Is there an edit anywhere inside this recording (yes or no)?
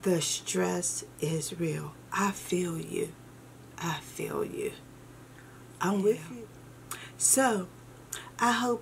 yes